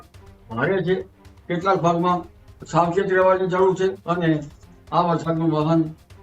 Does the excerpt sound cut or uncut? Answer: cut